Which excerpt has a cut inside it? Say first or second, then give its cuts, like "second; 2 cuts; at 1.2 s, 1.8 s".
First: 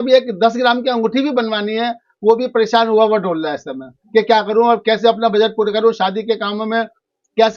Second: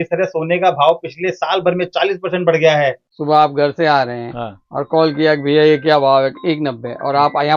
second; 1 cut; at 3.1 s